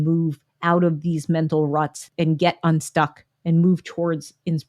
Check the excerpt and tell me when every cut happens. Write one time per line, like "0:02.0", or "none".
0:02.0